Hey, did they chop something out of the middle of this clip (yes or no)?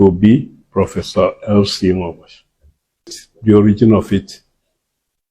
yes